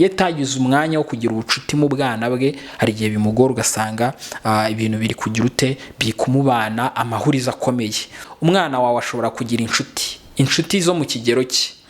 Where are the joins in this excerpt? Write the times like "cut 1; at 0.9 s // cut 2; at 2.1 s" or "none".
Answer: cut 1; at 8.3 s